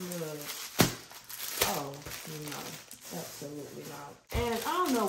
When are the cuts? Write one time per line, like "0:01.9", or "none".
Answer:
0:04.1